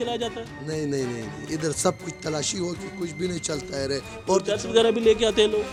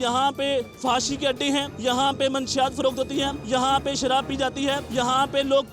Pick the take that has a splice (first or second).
second